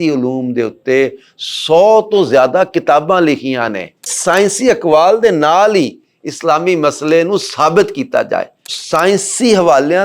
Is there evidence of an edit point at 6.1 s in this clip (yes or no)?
no